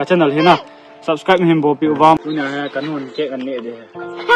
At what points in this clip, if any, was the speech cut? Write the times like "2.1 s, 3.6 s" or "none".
2.2 s